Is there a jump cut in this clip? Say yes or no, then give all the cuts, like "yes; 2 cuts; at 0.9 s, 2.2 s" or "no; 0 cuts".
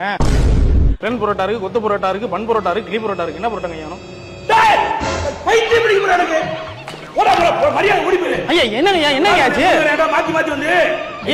no; 0 cuts